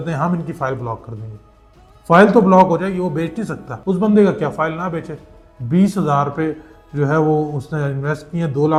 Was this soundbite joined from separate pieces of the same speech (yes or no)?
no